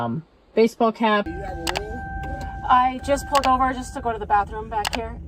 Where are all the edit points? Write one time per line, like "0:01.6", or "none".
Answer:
0:01.3